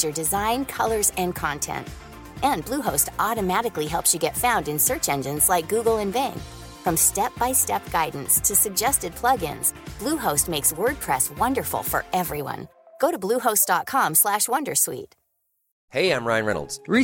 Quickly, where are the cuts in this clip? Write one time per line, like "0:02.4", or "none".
none